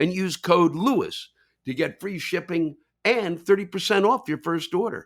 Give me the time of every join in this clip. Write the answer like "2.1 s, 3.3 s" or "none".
none